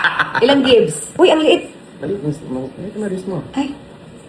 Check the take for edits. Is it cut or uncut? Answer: cut